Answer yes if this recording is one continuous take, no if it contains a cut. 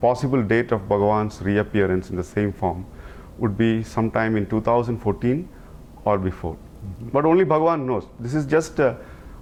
yes